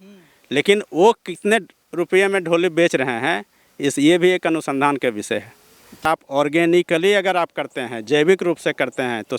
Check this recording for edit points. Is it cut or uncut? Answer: cut